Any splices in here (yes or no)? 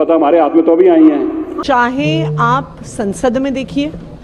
yes